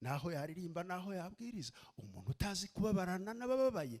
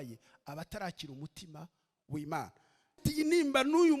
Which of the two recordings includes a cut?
second; 1 cut; at 3.0 s

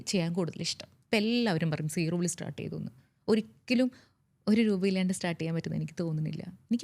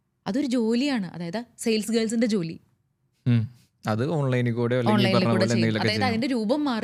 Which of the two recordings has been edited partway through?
first; 1 cut; at 1.0 s

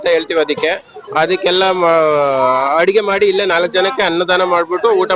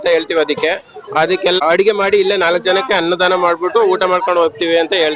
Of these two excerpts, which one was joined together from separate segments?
second; 1 cut; at 1.6 s

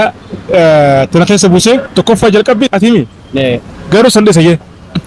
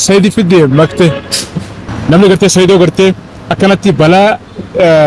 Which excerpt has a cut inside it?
first; 1 cut; at 3.6 s

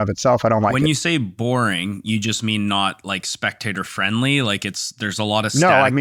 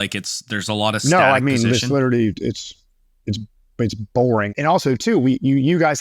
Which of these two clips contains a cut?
second; 1 cut; at 4.5 s

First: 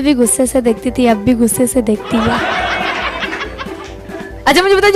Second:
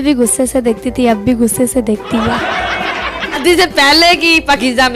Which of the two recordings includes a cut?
second; 1 cut; at 3.4 s

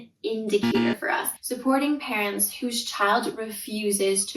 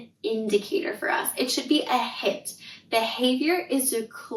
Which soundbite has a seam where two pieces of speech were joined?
first; 1 cut; at 1.3 s

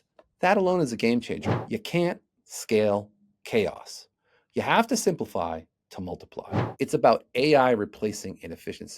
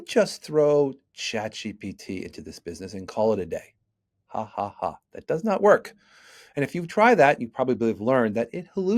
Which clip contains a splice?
first; 2 cuts; at 1.4 s, 6.6 s

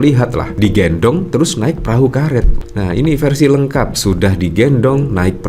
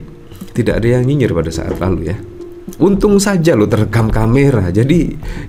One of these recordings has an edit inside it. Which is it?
first; 1 cut; at 2.5 s

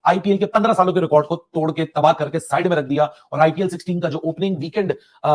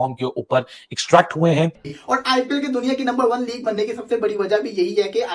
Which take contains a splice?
second; 1 cut; at 1.9 s

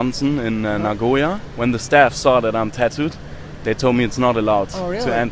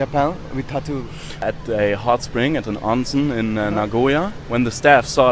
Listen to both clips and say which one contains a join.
second; 1 cut; at 1.4 s

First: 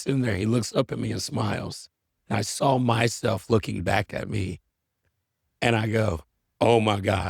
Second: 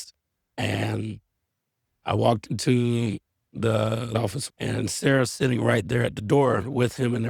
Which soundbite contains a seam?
second; 1 cut; at 4.1 s

